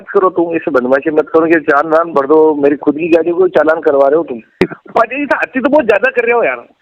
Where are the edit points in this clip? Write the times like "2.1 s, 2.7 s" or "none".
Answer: 4.6 s

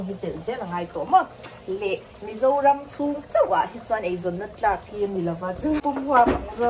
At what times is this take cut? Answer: 5.8 s

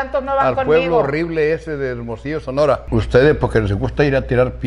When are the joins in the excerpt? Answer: 2.8 s

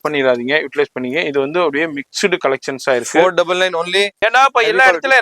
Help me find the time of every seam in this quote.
4.2 s

